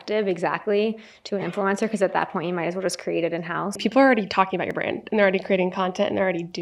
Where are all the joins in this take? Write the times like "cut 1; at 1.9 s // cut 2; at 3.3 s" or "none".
cut 1; at 3.8 s